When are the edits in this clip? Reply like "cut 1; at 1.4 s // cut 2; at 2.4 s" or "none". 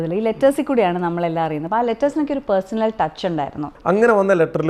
cut 1; at 1.6 s // cut 2; at 3.7 s